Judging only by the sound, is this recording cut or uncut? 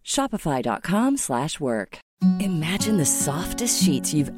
cut